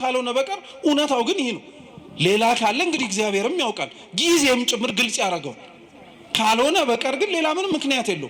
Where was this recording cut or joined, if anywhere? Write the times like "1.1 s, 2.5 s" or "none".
none